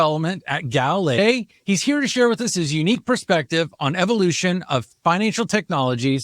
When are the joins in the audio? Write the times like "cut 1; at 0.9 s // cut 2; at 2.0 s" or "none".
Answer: cut 1; at 1.2 s